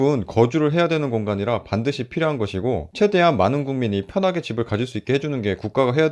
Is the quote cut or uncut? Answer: uncut